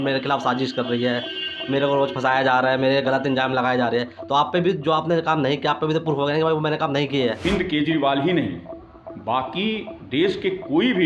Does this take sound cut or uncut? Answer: cut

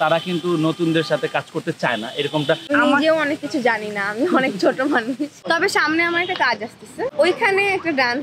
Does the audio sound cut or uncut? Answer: cut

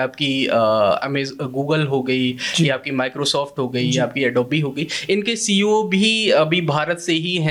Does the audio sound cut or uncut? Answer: uncut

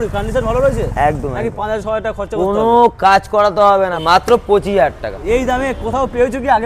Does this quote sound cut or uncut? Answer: cut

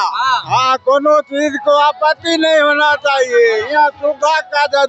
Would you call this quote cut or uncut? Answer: uncut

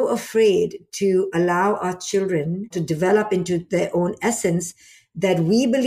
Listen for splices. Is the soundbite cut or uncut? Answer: cut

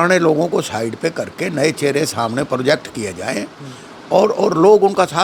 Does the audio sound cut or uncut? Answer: uncut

